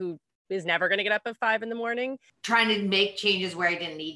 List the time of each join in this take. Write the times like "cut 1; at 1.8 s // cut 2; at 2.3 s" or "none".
cut 1; at 2.3 s